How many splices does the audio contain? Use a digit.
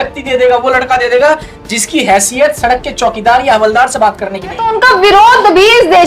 1